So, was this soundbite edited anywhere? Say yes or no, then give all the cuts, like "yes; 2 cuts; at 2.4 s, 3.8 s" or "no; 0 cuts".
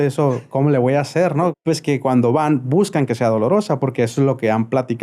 yes; 1 cut; at 1.5 s